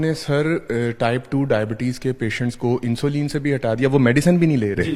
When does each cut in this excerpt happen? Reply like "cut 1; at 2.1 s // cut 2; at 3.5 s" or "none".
none